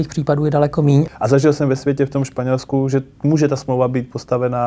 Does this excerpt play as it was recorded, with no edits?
no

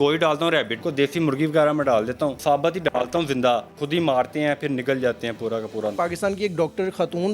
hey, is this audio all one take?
no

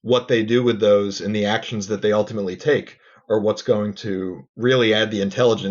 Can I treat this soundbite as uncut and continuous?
yes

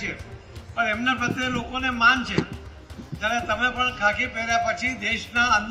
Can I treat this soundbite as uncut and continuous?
yes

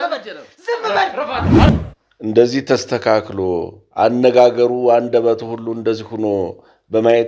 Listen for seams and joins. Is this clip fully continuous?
no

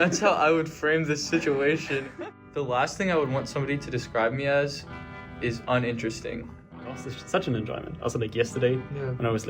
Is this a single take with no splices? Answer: no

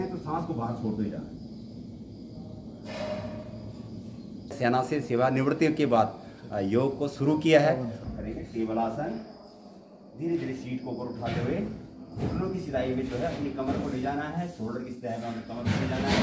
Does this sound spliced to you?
yes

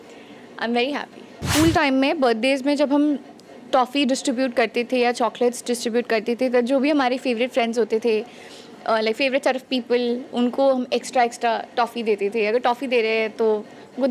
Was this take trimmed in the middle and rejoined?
yes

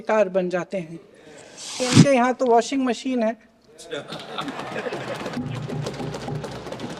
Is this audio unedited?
no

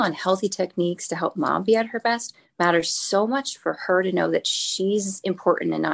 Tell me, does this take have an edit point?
no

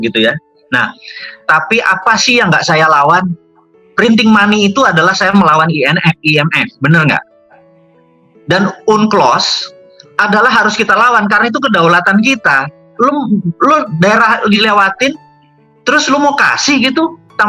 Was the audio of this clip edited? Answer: no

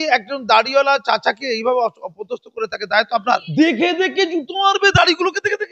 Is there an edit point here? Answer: yes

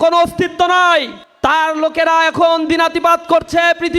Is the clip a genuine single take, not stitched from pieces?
no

